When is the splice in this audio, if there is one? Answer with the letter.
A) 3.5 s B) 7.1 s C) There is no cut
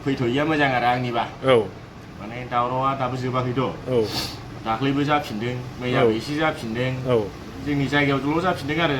C